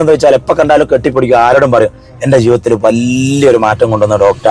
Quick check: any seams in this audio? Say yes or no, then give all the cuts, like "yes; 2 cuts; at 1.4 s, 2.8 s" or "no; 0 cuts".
no; 0 cuts